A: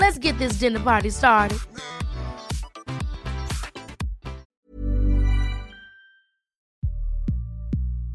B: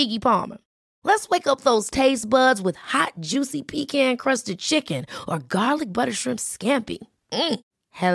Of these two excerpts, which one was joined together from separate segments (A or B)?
A